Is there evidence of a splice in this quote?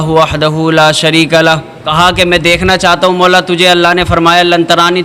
yes; 1 cut; at 1.8 s

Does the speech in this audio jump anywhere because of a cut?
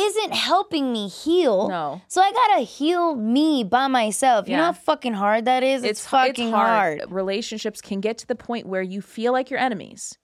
yes; 1 cut; at 7.0 s

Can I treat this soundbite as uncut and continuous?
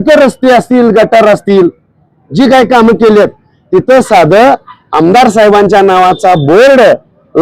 yes; 0 cuts

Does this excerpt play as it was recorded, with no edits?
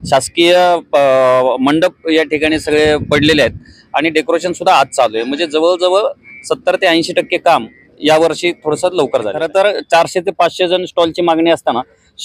no; 1 cut; at 9.4 s

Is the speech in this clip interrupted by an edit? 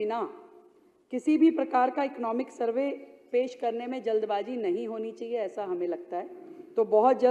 no; 0 cuts

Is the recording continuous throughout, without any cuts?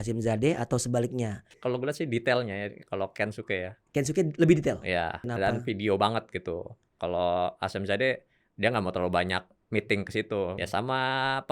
no; 4 cuts; at 1.6 s, 5.3 s, 6.9 s, 10.6 s

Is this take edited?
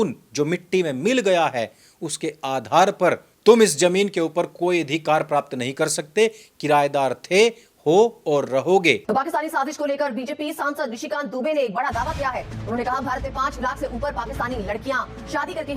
yes; 1 cut; at 9.0 s

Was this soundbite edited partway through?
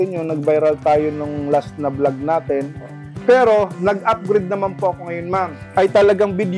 yes; 2 cuts; at 3.0 s, 5.5 s

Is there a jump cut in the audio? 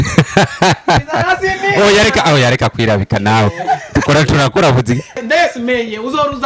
yes; 1 cut; at 5.2 s

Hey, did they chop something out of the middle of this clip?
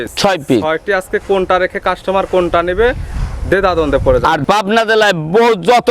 yes; 1 cut; at 4.4 s

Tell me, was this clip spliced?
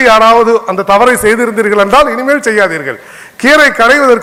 no; 0 cuts

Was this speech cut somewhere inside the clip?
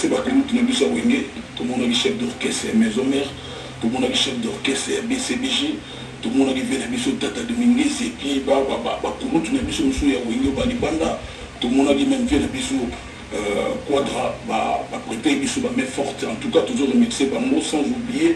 no; 0 cuts

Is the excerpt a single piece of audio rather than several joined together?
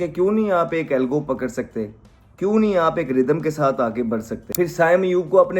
no; 1 cut; at 4.4 s

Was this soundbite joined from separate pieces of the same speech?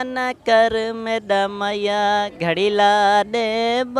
no; 0 cuts

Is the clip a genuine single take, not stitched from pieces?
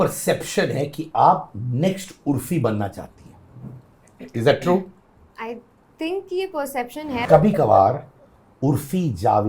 no; 1 cut; at 7.2 s

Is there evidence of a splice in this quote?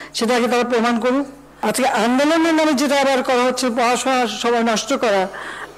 yes; 1 cut; at 1.4 s

